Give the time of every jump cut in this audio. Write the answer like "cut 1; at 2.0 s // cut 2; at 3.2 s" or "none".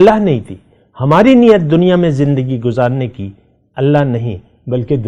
none